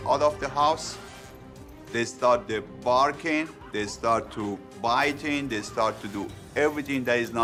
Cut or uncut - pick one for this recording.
uncut